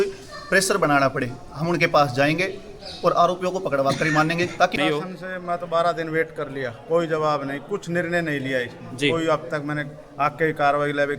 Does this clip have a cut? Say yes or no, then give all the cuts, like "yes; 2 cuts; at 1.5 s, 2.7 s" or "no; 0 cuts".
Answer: yes; 1 cut; at 4.8 s